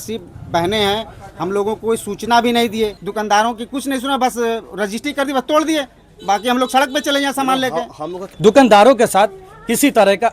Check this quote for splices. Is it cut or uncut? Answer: cut